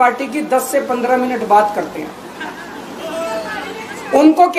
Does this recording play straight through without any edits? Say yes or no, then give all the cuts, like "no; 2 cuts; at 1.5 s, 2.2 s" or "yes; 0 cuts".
yes; 0 cuts